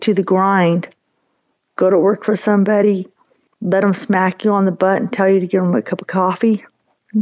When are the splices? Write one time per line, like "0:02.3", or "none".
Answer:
none